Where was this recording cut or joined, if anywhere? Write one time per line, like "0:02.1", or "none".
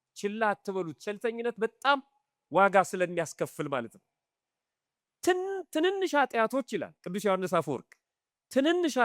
none